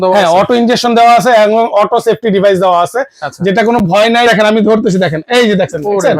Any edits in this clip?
yes; 1 cut; at 4.2 s

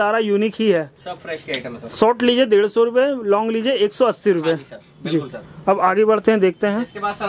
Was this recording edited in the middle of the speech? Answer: no; 0 cuts

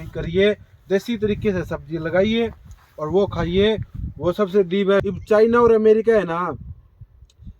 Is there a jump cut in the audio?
yes; 1 cut; at 5.0 s

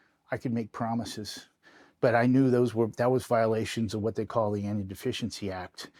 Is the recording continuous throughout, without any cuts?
yes; 0 cuts

